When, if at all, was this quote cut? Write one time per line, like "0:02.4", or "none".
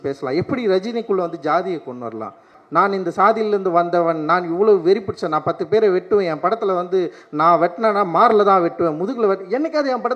0:02.6